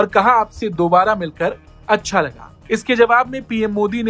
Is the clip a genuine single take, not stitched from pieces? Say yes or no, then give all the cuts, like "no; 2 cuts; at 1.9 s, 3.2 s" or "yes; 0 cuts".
yes; 0 cuts